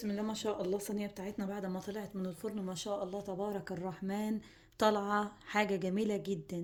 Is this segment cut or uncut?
uncut